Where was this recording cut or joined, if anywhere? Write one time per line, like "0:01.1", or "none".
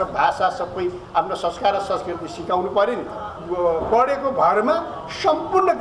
0:03.3